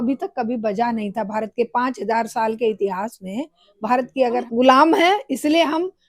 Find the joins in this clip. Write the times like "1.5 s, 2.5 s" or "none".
4.5 s